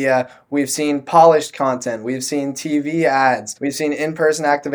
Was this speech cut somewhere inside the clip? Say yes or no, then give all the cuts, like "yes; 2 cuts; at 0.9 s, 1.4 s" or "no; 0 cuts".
yes; 1 cut; at 3.6 s